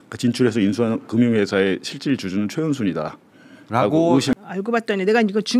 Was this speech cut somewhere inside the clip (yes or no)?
yes